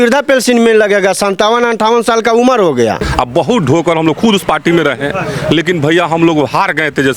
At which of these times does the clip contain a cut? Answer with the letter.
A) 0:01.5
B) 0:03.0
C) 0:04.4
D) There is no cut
B